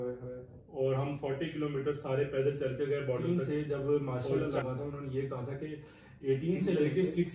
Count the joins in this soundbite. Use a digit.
1